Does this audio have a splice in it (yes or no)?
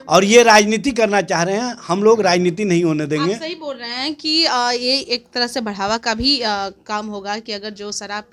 no